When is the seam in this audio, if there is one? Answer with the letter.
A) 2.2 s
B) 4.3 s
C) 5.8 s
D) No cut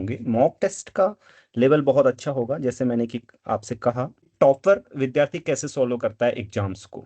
B